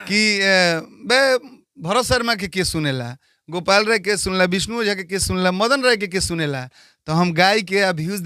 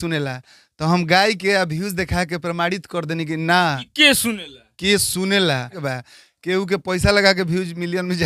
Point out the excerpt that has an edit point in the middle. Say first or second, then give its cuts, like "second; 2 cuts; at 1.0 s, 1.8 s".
second; 1 cut; at 5.9 s